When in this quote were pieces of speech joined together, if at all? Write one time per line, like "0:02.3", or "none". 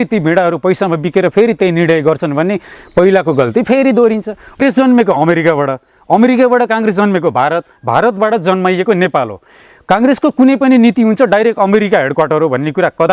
0:04.6

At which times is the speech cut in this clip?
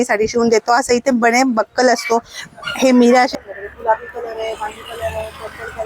0:03.4

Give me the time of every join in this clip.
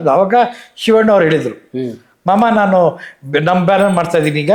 none

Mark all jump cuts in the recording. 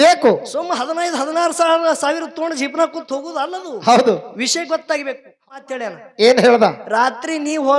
0:05.4

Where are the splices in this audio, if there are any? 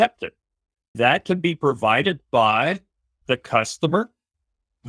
none

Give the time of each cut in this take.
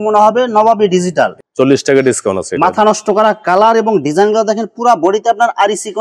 0:01.4

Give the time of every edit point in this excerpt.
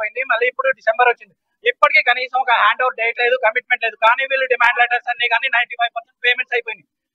none

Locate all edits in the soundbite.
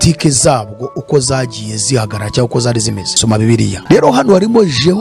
0:03.8

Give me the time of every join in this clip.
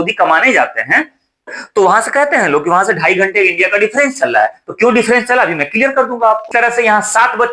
0:01.6
0:06.4

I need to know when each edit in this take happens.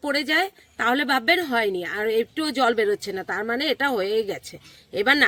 none

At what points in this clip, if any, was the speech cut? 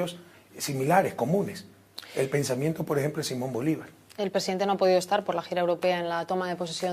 0:04.6

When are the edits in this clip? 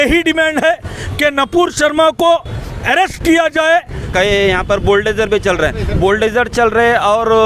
0:04.1

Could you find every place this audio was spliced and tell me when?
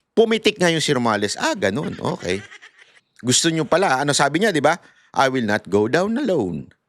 none

